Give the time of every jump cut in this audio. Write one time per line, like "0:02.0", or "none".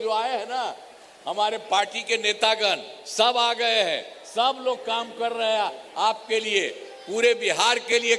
none

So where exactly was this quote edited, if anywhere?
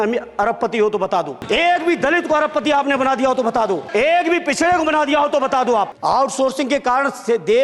0:01.4
0:03.8
0:05.9

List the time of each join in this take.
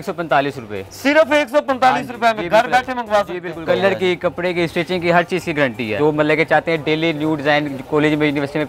0:03.6
0:05.9

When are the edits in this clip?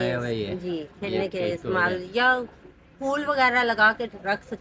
none

